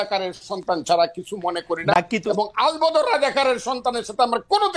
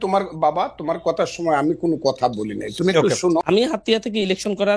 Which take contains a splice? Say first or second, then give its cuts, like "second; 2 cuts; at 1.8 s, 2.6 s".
second; 1 cut; at 3.4 s